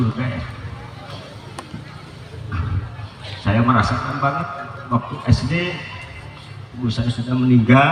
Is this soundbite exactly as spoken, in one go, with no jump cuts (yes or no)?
yes